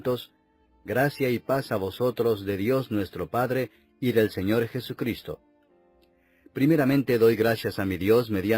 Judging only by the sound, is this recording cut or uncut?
cut